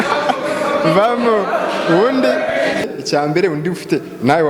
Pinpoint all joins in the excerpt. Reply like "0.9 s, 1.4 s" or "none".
2.9 s